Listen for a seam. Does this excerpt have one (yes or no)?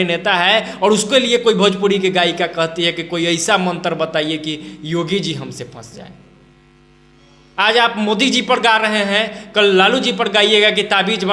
no